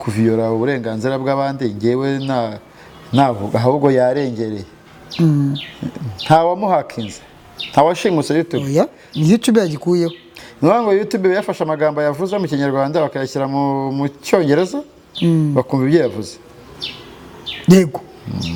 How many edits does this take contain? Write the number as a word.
zero